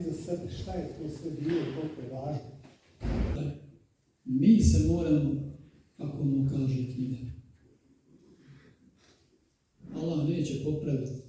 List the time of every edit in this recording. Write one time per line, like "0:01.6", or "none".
0:03.3